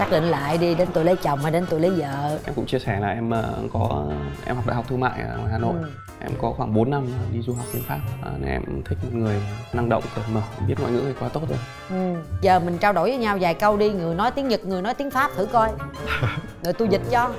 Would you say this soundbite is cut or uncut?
cut